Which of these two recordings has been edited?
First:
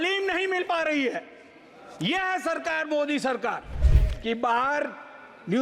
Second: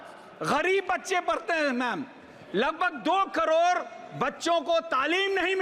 first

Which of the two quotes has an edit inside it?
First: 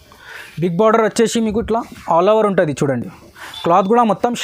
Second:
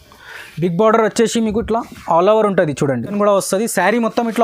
second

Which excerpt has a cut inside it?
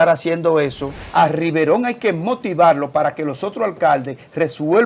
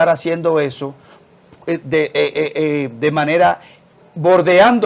first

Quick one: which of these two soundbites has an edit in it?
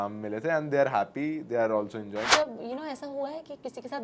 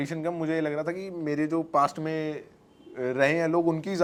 first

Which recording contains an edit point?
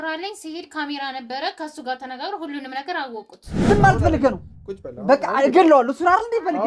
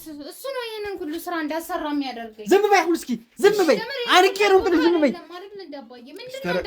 first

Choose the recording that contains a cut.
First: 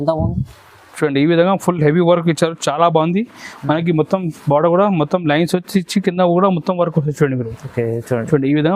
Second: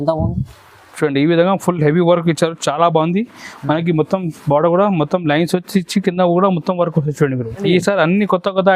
second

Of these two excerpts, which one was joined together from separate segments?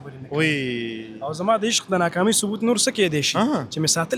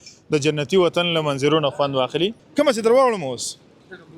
second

